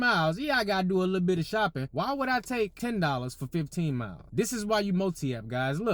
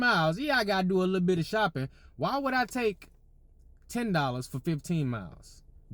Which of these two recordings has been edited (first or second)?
first